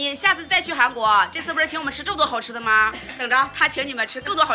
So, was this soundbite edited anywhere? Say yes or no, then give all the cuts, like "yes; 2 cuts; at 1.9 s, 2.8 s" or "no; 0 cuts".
yes; 1 cut; at 3.2 s